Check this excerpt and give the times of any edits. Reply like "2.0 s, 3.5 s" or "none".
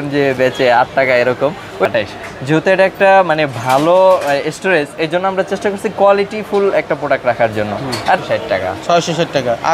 1.9 s, 8.2 s